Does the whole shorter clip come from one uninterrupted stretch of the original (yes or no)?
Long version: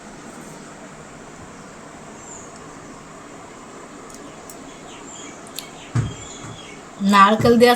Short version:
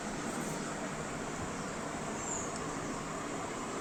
yes